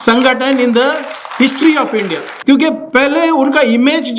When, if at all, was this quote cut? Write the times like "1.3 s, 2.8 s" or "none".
2.3 s